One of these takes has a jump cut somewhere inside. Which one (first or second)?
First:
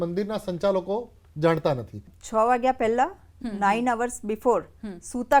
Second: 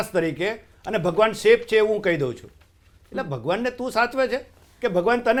first